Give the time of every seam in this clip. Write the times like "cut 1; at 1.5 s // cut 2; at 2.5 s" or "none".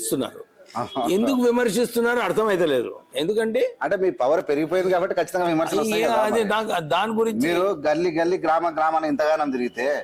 none